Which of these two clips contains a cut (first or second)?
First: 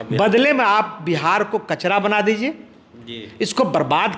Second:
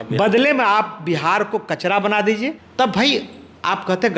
second